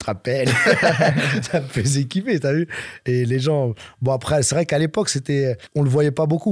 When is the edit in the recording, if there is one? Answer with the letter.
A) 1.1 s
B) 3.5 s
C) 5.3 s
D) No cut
D